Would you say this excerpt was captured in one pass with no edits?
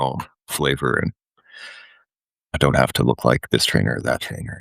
no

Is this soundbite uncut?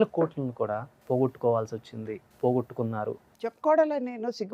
no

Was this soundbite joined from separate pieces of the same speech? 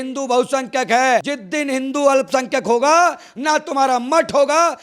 no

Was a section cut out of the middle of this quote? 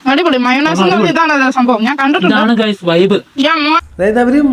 no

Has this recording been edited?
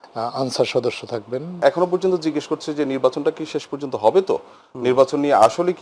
yes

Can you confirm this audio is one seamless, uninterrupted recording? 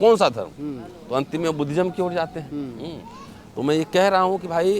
yes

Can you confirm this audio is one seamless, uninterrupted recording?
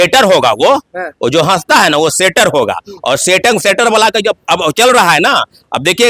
yes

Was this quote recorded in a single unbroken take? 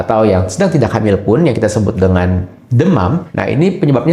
yes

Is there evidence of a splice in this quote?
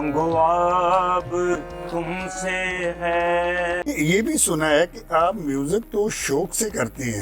yes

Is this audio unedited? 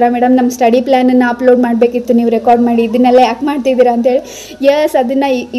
yes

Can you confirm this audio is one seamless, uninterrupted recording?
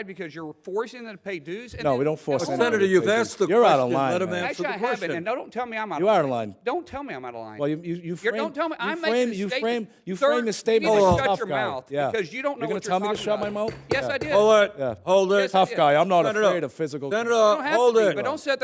yes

